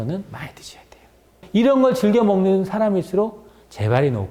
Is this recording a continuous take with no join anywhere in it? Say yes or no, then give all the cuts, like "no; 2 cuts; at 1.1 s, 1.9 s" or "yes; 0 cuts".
no; 1 cut; at 1.4 s